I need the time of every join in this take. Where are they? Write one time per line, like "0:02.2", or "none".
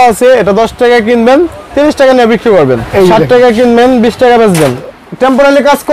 0:02.9
0:04.9